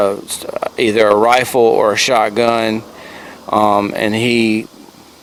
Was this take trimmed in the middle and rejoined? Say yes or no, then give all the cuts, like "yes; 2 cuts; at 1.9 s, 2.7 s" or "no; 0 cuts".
no; 0 cuts